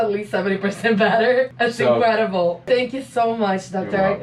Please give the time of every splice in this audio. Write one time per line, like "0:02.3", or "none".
0:01.5
0:02.7